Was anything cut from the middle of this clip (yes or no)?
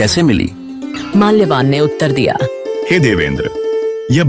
no